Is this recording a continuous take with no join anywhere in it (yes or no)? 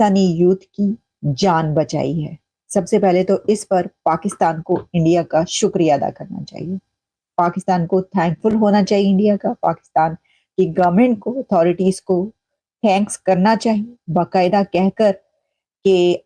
yes